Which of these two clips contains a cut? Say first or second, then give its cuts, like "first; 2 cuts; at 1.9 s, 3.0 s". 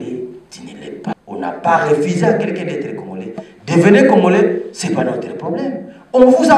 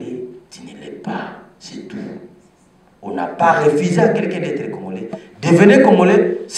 first; 1 cut; at 1.1 s